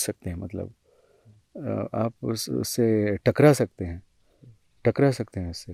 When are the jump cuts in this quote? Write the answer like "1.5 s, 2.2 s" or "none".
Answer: none